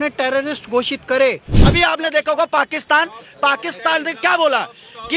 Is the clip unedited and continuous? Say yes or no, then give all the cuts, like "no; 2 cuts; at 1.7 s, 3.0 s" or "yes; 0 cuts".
no; 1 cut; at 1.5 s